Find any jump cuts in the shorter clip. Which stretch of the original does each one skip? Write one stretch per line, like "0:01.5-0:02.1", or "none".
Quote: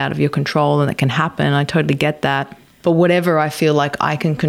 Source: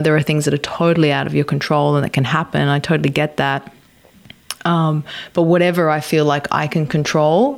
0:03.8-0:05.2